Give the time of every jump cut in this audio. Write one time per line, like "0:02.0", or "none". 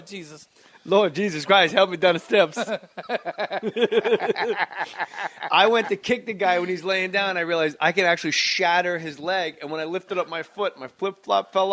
0:10.4